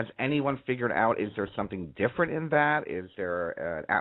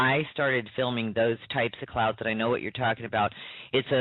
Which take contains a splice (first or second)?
first